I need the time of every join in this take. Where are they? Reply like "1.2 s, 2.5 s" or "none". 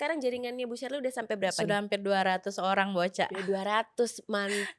none